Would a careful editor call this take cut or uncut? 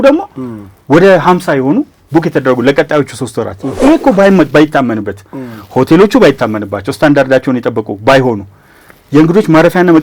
cut